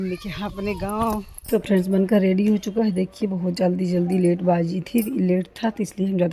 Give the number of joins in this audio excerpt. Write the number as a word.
one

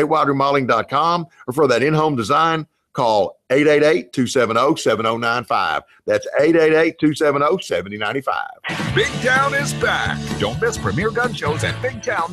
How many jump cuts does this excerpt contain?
two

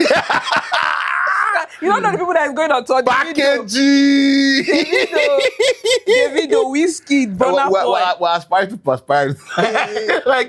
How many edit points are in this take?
zero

